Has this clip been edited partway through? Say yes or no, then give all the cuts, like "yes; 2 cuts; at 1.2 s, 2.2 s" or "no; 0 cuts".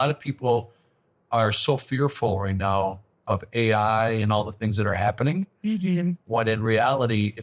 no; 0 cuts